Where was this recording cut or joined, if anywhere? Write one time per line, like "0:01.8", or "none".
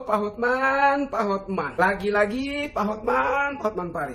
none